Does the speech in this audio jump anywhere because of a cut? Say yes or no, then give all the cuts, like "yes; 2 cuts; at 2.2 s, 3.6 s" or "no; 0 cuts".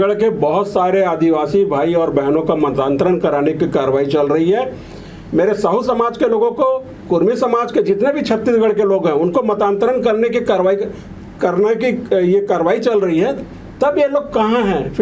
no; 0 cuts